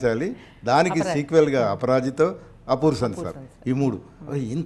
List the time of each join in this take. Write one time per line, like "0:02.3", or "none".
none